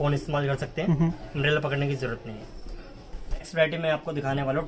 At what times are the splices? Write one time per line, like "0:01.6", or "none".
none